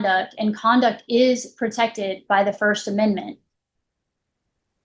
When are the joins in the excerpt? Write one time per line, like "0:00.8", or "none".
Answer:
none